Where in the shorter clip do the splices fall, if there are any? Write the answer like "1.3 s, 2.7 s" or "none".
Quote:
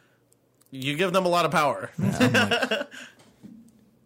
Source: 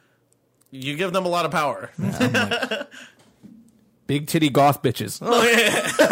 none

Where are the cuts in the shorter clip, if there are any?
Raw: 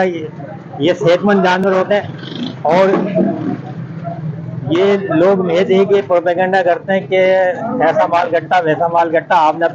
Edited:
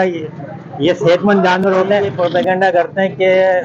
2.1 s

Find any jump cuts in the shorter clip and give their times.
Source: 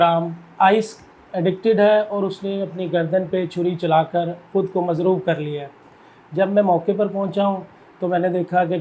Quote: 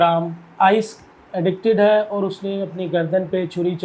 none

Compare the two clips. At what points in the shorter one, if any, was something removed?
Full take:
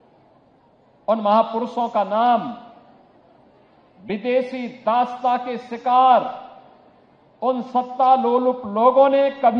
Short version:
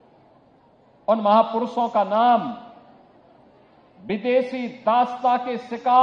none

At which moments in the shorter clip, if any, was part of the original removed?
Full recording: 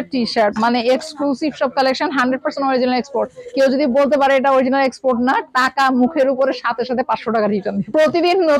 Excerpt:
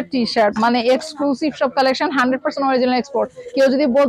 none

